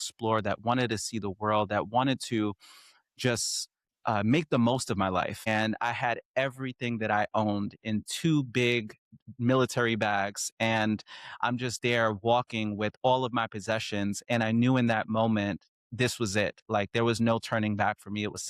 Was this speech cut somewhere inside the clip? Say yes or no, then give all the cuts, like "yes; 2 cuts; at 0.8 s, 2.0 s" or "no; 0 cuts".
yes; 1 cut; at 5.5 s